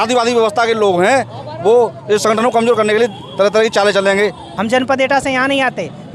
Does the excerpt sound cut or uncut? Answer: cut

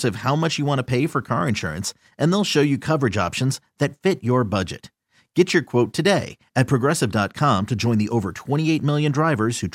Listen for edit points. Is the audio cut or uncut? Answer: uncut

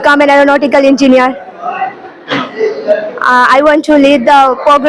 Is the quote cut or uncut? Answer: uncut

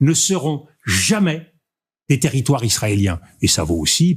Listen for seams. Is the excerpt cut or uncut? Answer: uncut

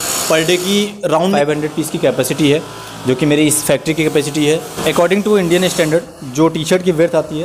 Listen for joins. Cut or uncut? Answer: cut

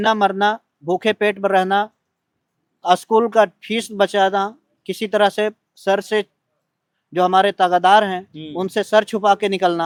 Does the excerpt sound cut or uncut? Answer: uncut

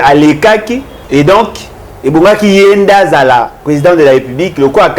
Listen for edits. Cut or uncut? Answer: cut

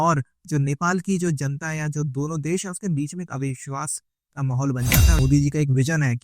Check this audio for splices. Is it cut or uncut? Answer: cut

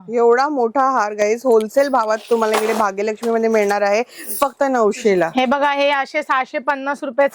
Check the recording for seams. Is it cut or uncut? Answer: uncut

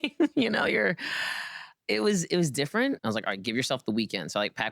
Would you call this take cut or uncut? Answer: cut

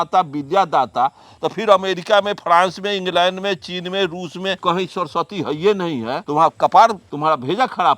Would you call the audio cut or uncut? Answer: cut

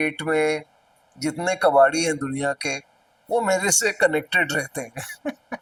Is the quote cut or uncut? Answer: uncut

